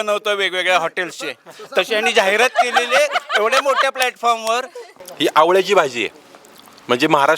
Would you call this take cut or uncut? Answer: cut